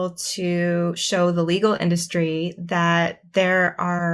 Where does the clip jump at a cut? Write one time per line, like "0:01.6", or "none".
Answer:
none